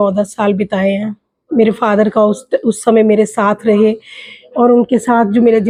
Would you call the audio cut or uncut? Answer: uncut